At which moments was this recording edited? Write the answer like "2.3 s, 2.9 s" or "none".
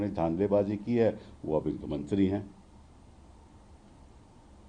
none